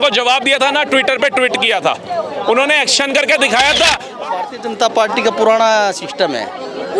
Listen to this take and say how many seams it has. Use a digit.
1